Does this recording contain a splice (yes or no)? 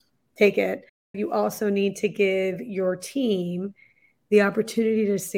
yes